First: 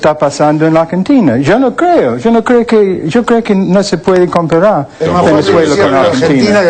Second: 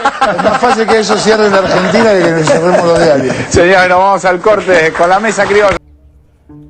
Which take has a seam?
second; 1 cut; at 5.8 s

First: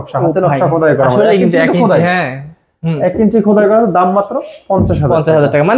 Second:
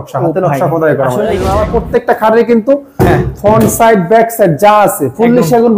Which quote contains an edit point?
second; 1 cut; at 1.5 s

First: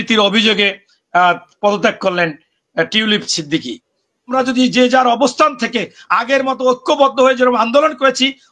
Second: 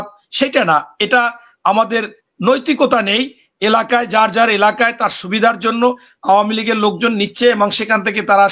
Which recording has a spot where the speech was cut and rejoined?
first; 1 cut; at 4.3 s

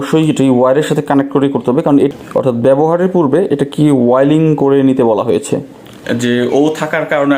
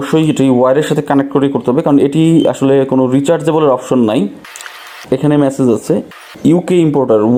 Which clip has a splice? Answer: first; 2 cuts; at 2.1 s, 6.0 s

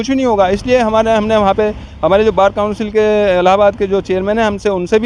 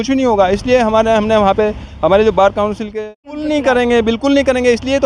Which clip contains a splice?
second; 1 cut; at 3.0 s

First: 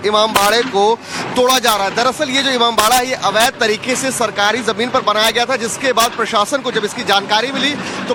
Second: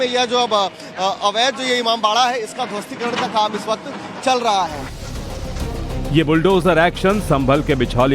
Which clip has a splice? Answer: second; 1 cut; at 3.3 s

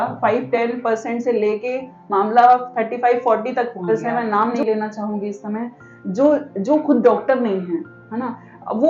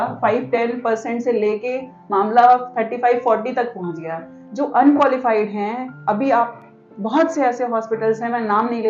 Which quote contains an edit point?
first; 1 cut; at 3.8 s

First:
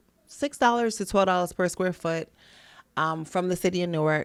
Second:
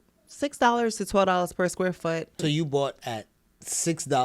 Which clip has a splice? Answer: second; 1 cut; at 2.4 s

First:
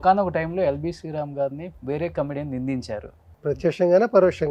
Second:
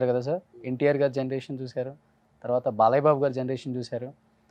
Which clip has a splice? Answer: first; 2 cuts; at 1.7 s, 3.2 s

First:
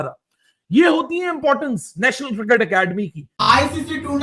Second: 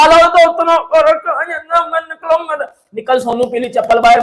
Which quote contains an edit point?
first; 1 cut; at 3.2 s

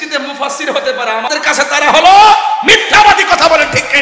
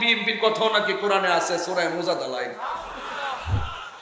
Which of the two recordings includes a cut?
first; 1 cut; at 1.3 s

